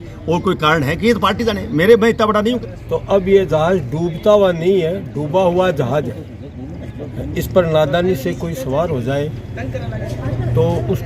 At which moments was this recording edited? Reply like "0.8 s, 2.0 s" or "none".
2.6 s